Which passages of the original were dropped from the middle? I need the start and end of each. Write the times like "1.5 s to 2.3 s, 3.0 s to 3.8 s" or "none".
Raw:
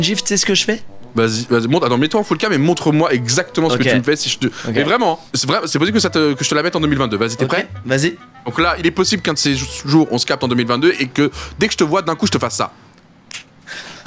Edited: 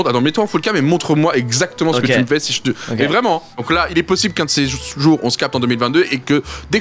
5.3 s to 8.4 s